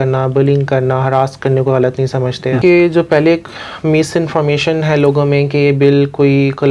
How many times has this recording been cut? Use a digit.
1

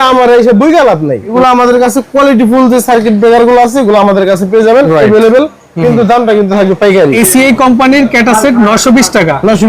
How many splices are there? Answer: 2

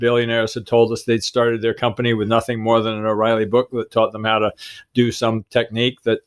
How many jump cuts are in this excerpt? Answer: 0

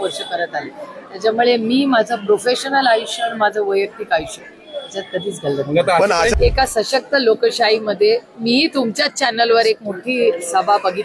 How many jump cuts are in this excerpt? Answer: 1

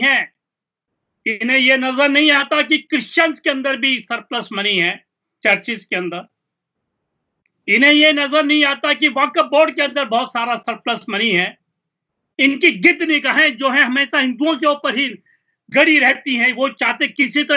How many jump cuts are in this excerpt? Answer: 0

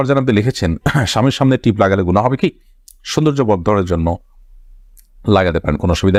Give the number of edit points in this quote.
0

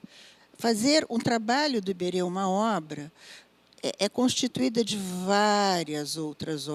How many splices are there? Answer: 0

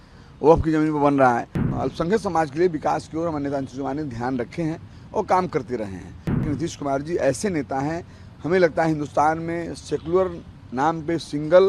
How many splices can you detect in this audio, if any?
2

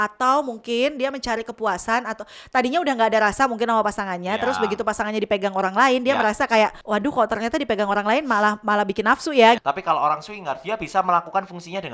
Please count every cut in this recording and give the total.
2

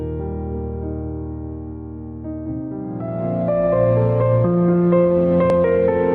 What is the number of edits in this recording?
1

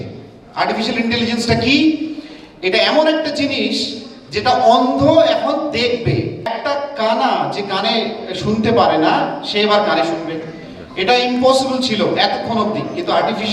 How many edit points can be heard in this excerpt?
1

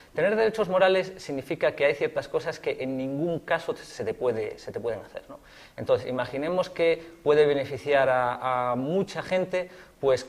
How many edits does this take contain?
1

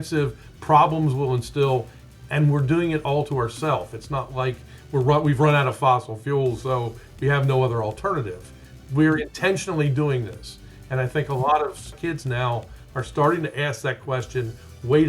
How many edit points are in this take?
1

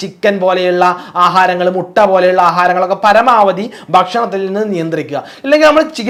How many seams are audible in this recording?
0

